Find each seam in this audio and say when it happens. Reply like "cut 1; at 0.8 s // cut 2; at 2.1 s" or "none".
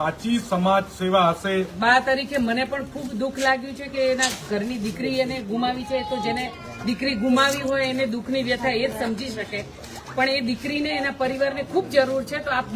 cut 1; at 1.7 s